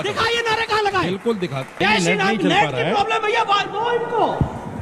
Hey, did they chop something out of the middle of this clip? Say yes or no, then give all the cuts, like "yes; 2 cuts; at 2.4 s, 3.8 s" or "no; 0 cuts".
yes; 1 cut; at 1.7 s